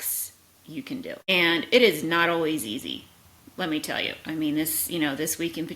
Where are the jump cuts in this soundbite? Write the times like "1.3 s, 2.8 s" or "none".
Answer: none